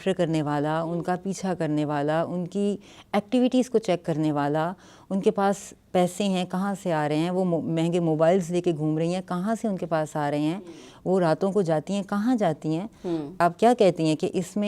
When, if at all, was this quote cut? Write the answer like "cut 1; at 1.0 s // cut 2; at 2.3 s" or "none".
cut 1; at 13.4 s